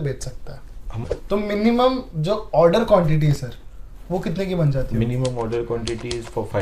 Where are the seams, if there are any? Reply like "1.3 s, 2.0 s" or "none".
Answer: 1.0 s